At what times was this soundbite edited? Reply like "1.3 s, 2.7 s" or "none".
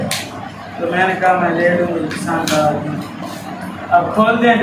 none